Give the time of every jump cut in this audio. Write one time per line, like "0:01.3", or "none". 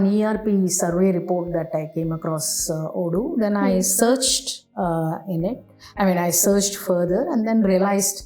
none

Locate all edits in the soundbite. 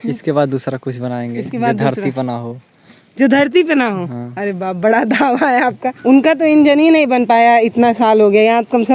0:05.9

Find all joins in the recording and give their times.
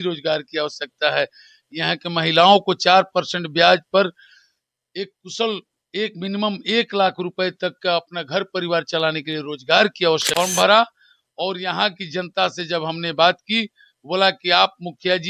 0:10.3

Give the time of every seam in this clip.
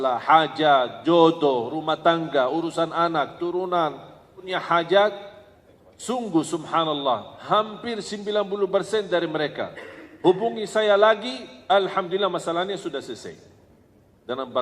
0:04.5

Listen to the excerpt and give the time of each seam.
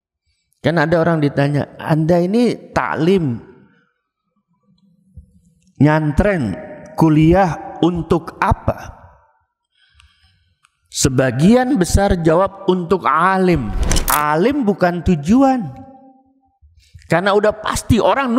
0:13.9

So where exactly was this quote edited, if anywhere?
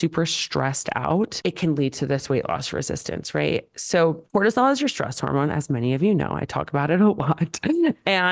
none

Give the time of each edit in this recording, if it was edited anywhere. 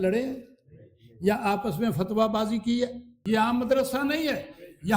0:03.1

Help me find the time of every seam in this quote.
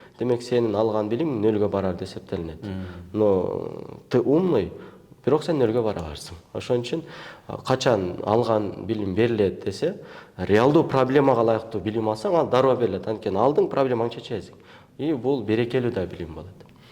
none

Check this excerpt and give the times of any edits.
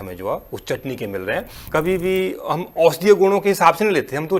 0:01.6

